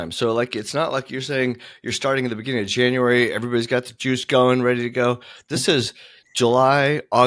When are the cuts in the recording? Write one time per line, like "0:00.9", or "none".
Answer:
none